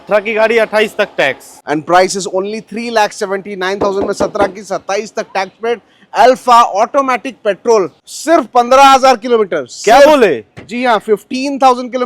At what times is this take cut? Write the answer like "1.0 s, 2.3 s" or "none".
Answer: 1.5 s, 8.1 s